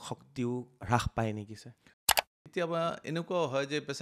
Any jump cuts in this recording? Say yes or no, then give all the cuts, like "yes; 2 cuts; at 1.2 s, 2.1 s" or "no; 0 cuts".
yes; 1 cut; at 2.2 s